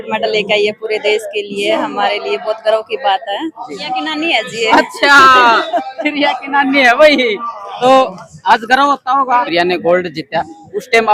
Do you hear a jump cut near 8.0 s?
no; 2 cuts; at 3.6 s, 9.5 s

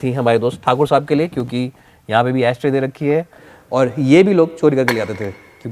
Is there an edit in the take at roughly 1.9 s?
no; 1 cut; at 3.5 s

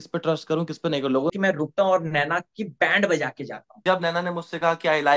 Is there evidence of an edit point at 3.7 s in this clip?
yes; 2 cuts; at 1.3 s, 3.7 s

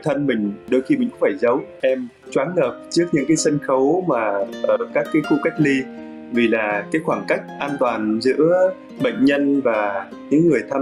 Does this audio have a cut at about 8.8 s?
no; 1 cut; at 1.8 s

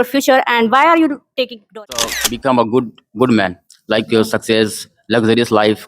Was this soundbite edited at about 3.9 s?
no; 1 cut; at 2.2 s

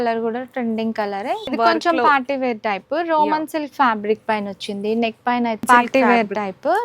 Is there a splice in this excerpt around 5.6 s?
yes; 2 cuts; at 1.5 s, 5.6 s

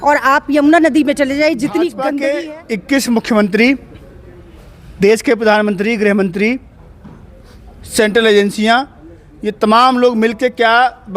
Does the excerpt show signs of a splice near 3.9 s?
no; 1 cut; at 2.1 s

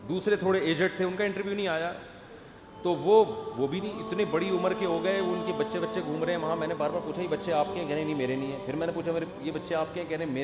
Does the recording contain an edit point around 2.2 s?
no; 0 cuts

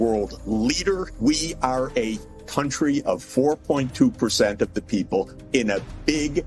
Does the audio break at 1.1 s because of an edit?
yes; 1 cut; at 1.1 s

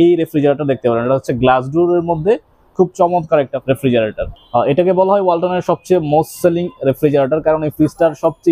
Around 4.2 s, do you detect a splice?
yes; 1 cut; at 4.2 s

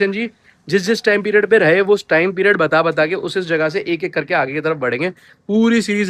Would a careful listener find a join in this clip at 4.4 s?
no; 0 cuts

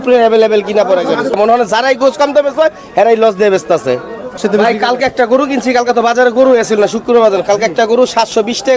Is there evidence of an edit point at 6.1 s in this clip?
no; 2 cuts; at 1.4 s, 4.4 s

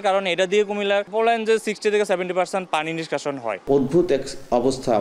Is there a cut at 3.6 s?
yes; 2 cuts; at 1.1 s, 3.6 s

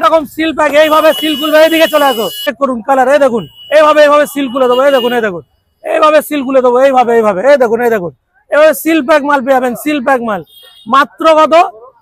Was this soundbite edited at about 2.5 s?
yes; 1 cut; at 2.5 s

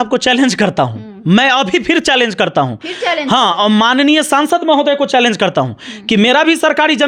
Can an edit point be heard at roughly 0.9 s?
no; 0 cuts

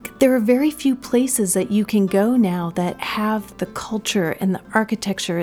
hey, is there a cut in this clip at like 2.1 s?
no; 1 cut; at 3.4 s

